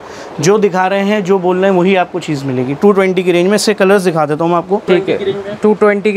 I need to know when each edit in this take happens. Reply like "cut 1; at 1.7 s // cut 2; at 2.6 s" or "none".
cut 1; at 4.8 s